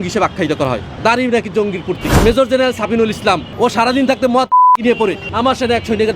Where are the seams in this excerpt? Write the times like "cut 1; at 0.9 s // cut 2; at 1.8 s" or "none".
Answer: cut 1; at 0.9 s // cut 2; at 2.1 s // cut 3; at 3.5 s // cut 4; at 5.3 s